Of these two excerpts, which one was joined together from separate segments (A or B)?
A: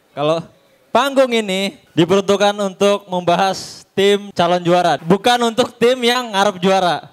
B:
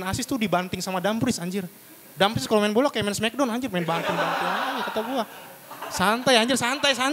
A